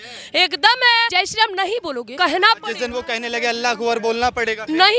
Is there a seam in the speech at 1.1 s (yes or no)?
yes